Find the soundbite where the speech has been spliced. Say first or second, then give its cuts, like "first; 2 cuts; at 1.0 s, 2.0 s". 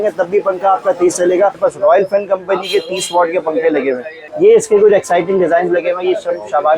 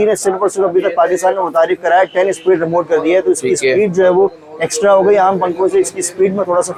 first; 2 cuts; at 1.6 s, 4.2 s